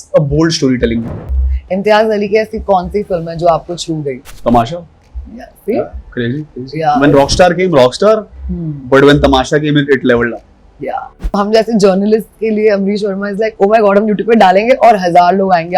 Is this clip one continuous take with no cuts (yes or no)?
no